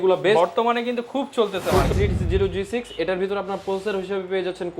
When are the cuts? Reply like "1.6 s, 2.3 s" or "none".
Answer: 1.9 s